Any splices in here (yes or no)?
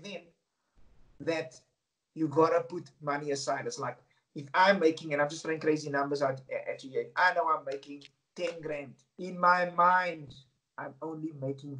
no